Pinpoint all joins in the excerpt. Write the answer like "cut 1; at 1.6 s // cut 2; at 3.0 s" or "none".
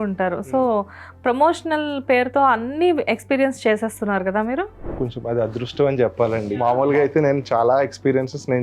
cut 1; at 6.5 s